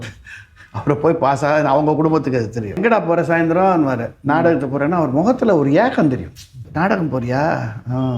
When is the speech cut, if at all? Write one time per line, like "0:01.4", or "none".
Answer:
0:02.8
0:06.6

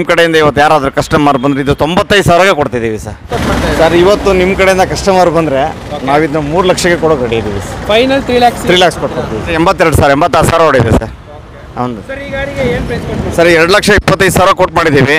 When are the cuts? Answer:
0:03.3
0:09.5

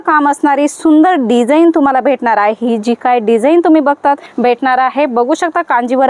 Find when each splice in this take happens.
0:04.3

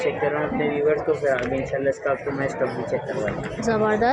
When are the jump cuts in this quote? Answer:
none

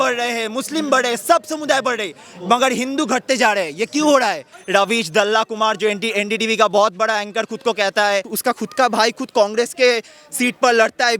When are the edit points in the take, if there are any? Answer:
0:04.5
0:08.3

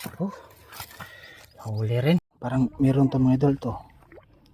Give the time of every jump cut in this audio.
0:02.4

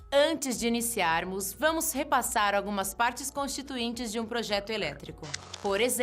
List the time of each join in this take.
0:02.9

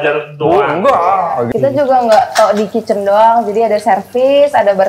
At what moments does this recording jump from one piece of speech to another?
0:01.5

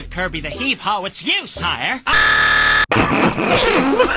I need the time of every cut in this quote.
0:02.8

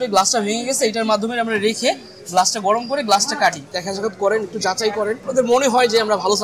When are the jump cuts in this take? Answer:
0:03.7
0:05.3

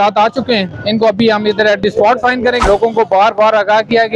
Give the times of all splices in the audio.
0:02.6

